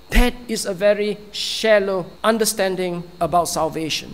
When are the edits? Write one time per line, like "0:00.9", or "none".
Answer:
0:02.1